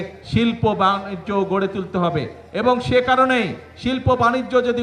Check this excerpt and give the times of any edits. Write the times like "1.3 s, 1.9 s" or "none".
none

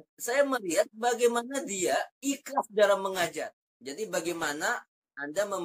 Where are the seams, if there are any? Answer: 3.4 s

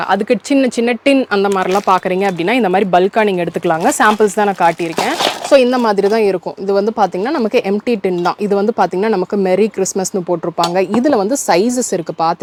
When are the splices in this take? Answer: none

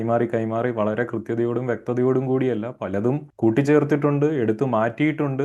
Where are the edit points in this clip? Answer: none

